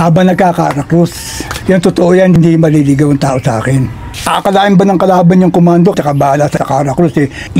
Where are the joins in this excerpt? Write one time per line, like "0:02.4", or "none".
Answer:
0:01.5
0:04.1